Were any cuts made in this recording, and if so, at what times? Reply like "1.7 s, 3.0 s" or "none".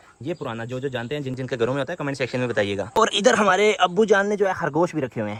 none